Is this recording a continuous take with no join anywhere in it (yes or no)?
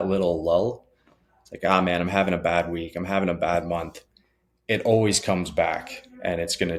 yes